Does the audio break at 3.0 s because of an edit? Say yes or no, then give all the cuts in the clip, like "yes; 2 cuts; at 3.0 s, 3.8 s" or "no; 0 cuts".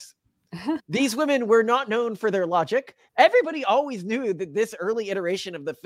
yes; 1 cut; at 3.0 s